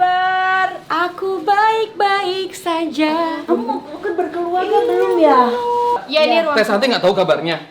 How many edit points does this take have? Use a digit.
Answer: 1